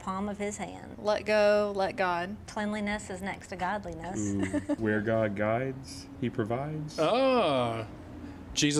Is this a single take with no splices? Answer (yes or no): yes